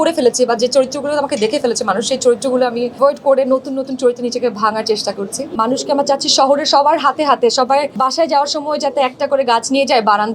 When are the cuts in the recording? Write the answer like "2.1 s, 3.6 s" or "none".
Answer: 3.0 s, 5.5 s, 7.9 s